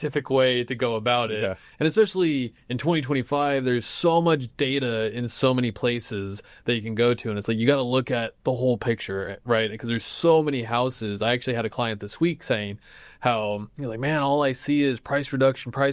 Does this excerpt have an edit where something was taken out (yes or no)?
no